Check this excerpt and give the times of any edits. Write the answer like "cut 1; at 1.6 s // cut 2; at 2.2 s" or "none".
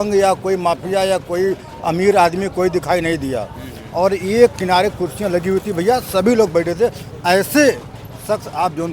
none